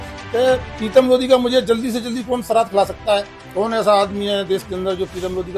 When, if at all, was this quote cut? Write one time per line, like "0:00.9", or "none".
none